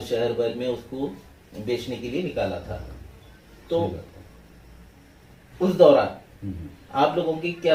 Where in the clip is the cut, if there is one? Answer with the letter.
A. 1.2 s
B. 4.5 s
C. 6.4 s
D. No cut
D